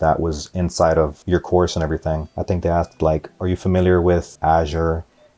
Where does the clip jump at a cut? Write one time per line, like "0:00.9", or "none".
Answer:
0:01.2
0:02.3
0:03.3
0:04.3